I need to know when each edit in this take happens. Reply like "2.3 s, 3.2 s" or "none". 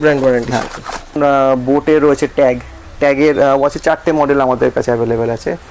1.2 s

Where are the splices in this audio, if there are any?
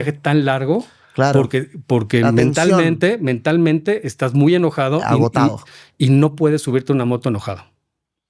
none

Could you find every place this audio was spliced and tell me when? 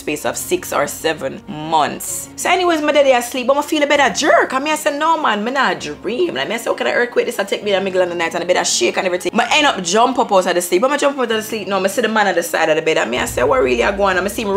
2.3 s, 9.3 s

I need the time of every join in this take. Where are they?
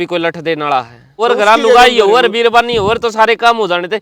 1.1 s

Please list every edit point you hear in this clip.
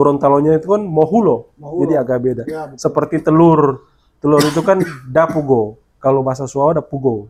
none

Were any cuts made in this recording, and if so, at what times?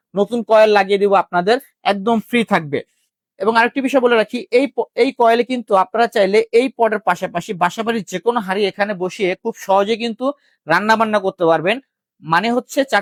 none

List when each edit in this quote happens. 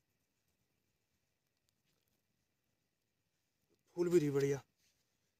none

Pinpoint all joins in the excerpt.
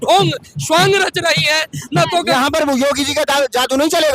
2.3 s

